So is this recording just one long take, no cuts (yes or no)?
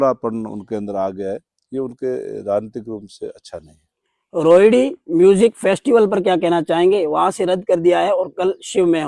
yes